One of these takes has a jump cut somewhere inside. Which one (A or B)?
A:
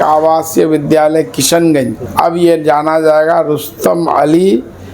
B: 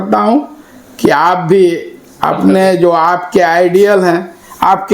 A